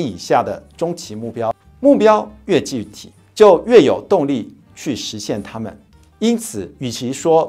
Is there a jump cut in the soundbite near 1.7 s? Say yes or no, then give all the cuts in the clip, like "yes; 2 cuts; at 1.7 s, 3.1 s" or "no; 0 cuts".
yes; 1 cut; at 1.7 s